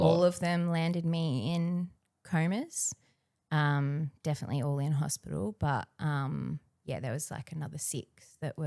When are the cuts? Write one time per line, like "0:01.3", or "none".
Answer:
none

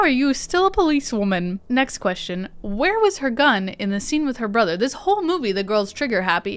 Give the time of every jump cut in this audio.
none

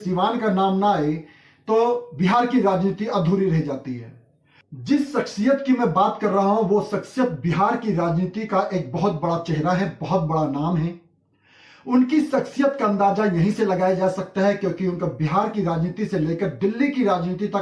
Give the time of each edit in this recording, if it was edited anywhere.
none

